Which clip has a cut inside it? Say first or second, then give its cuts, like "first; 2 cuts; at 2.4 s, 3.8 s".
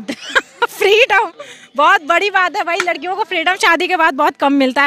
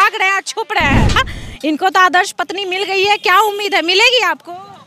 second; 1 cut; at 1.3 s